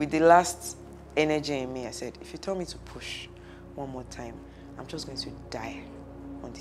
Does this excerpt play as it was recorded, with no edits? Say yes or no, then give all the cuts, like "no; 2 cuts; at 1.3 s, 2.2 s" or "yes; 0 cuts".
yes; 0 cuts